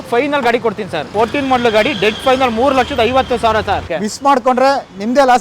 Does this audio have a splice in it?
yes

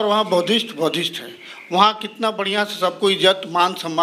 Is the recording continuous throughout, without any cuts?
yes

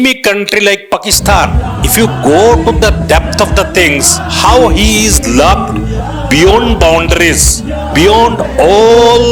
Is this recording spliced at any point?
no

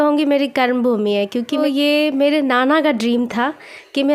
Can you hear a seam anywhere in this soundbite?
yes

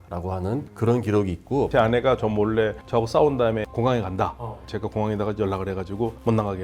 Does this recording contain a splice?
yes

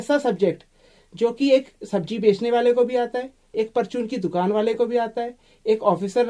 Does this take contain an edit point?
no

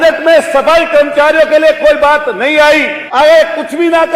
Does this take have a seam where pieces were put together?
yes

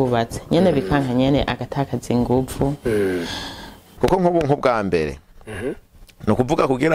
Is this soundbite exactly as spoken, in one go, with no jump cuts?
no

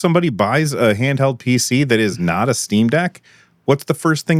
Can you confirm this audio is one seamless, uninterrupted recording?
yes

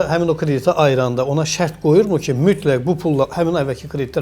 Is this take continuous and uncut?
yes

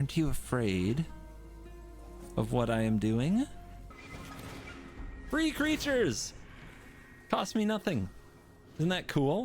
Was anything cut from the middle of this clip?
yes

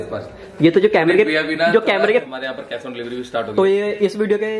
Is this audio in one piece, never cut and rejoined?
no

